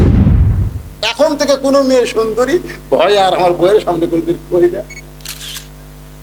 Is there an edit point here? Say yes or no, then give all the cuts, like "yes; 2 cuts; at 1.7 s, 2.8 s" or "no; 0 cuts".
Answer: no; 0 cuts